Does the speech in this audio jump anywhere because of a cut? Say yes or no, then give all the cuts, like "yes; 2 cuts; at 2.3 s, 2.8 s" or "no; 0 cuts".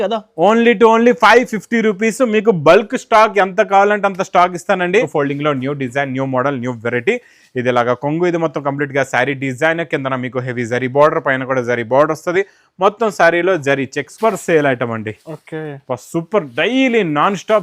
yes; 2 cuts; at 5.1 s, 14.1 s